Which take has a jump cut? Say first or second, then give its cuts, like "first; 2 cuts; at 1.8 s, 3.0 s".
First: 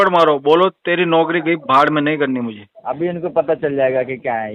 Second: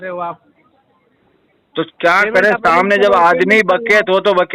first; 1 cut; at 2.7 s